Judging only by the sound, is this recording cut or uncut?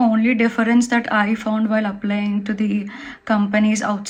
uncut